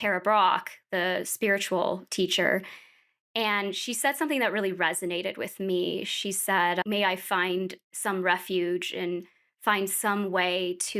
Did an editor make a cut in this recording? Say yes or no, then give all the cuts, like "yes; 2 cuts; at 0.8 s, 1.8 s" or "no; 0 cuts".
yes; 1 cut; at 6.8 s